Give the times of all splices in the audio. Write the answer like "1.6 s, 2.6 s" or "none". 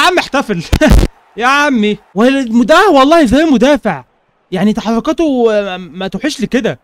2.0 s